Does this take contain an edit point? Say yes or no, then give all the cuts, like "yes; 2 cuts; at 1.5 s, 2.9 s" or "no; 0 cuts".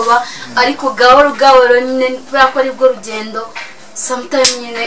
no; 0 cuts